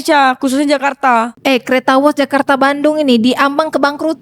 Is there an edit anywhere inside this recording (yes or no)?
yes